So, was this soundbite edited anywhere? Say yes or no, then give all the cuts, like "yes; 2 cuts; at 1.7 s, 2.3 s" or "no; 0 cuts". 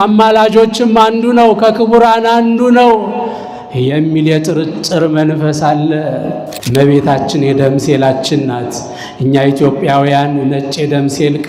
yes; 1 cut; at 6.5 s